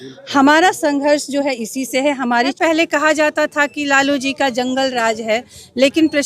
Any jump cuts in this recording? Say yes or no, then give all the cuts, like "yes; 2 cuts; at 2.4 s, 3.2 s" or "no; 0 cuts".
yes; 1 cut; at 2.6 s